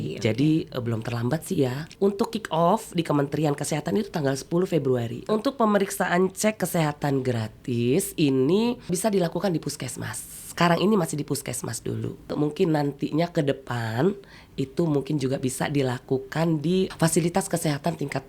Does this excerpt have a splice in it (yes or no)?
yes